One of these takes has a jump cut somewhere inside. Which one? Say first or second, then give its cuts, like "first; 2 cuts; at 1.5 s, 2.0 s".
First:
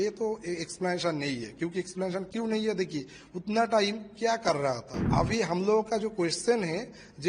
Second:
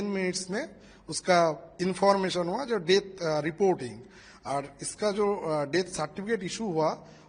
first; 1 cut; at 5.1 s